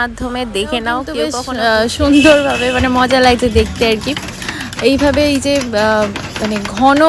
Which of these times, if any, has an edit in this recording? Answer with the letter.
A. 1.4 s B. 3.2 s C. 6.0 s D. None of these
A